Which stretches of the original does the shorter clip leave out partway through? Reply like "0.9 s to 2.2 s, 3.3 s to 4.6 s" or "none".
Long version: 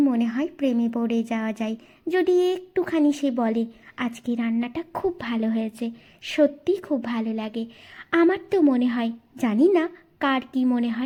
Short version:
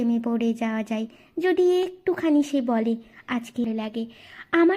4.3 s to 7.2 s